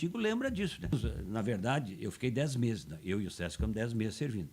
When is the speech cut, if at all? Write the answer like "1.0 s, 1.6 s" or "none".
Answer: 0.9 s